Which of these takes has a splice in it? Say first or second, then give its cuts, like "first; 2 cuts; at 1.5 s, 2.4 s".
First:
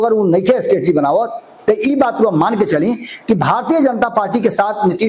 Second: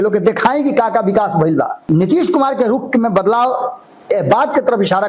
second; 1 cut; at 1.8 s